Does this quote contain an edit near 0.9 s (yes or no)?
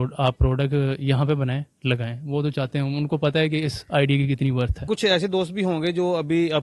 no